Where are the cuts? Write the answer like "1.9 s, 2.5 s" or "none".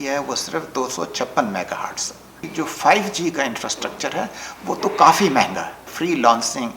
2.4 s, 5.9 s